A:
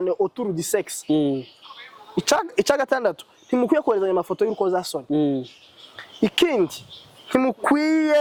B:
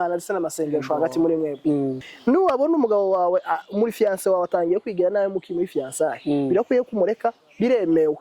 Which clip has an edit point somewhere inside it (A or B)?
B